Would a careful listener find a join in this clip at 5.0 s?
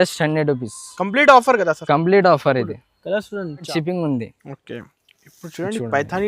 no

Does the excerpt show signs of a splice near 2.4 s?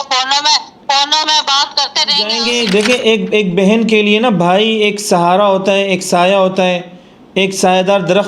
yes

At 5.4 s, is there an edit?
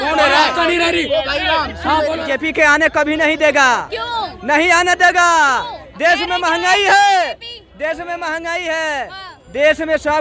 no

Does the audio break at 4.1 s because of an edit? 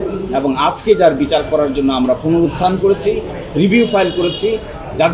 no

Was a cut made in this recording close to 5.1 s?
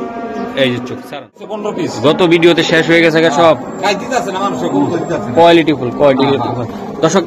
no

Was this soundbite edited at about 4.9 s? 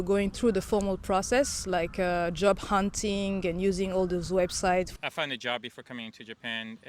yes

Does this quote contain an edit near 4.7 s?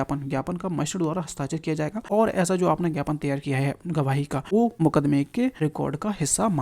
yes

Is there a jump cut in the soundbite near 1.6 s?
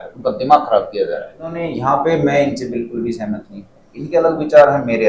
yes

